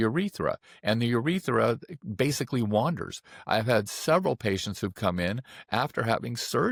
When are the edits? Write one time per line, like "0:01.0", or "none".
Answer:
none